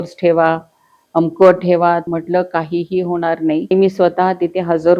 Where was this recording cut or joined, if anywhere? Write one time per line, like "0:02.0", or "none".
0:02.0
0:03.7

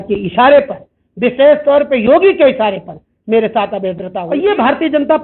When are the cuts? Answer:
0:04.1

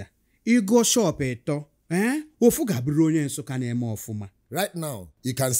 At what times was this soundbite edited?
0:01.7
0:04.4

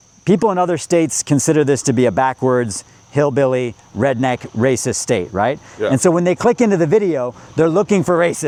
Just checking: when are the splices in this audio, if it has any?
none

